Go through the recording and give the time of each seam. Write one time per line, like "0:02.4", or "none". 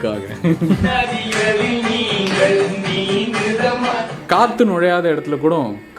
0:00.9
0:04.1